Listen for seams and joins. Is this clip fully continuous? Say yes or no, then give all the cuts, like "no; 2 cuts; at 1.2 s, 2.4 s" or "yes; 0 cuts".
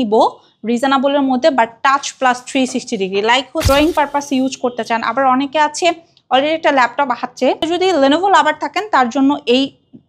no; 2 cuts; at 3.6 s, 7.7 s